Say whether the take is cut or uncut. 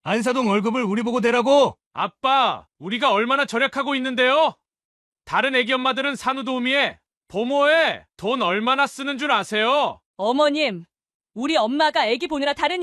cut